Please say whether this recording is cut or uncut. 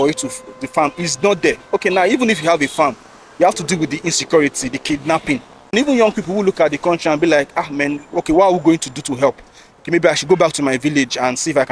cut